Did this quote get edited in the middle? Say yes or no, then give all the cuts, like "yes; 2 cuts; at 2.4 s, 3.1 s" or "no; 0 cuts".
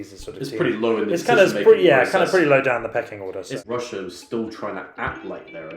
yes; 1 cut; at 3.5 s